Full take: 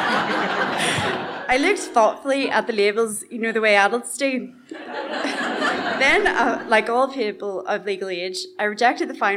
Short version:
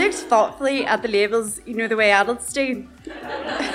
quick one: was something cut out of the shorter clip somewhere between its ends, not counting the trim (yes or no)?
no